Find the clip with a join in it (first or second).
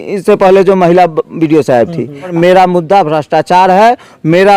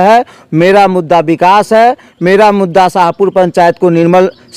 first